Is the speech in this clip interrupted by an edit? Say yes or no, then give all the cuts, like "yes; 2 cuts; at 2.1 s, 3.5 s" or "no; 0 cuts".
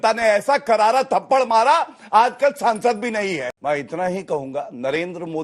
yes; 1 cut; at 3.5 s